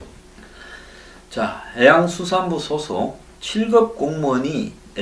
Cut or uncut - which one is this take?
cut